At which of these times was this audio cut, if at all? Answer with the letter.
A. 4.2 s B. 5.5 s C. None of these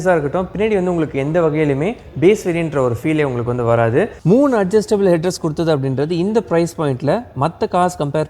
A